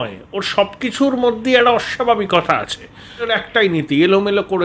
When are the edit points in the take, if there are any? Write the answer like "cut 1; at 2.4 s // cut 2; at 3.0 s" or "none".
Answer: cut 1; at 3.3 s